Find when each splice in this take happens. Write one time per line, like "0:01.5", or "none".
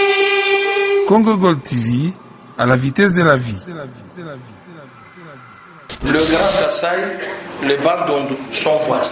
0:05.8